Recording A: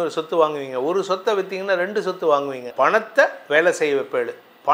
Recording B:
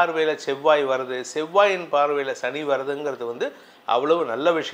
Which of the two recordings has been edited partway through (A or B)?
A